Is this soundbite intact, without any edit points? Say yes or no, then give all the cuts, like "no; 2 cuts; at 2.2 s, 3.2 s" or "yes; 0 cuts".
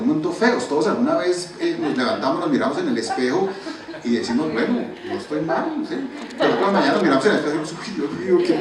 yes; 0 cuts